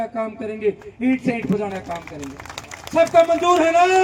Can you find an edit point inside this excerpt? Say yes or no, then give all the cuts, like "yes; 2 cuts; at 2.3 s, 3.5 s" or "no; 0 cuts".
no; 0 cuts